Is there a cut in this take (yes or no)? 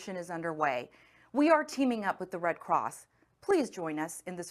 no